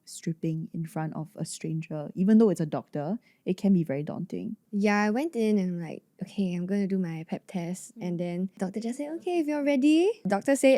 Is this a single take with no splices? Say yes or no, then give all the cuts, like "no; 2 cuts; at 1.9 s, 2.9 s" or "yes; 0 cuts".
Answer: yes; 0 cuts